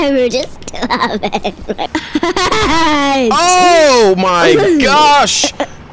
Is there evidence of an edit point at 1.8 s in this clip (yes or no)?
yes